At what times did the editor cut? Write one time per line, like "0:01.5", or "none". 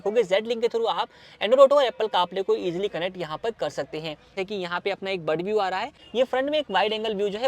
0:04.3
0:06.0